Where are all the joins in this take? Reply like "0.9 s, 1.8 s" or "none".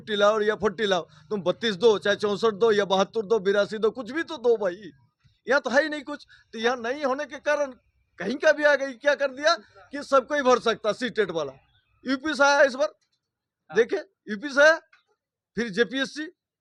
none